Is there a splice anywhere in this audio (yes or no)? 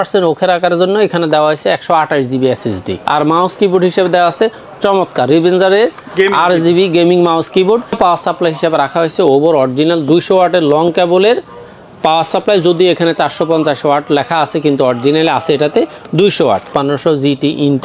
yes